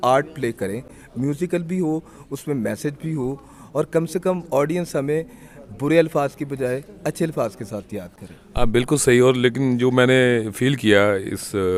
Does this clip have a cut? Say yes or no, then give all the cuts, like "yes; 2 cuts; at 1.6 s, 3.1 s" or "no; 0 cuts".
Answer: no; 0 cuts